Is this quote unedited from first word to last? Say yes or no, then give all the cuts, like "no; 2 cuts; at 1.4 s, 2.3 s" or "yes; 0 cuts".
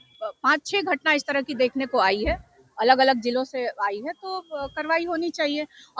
yes; 0 cuts